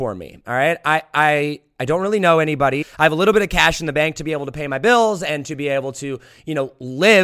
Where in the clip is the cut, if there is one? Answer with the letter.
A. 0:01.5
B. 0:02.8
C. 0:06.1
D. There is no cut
B